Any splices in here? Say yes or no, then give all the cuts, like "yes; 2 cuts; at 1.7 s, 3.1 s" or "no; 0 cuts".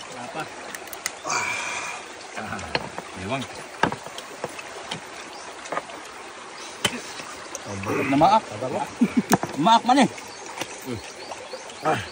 no; 0 cuts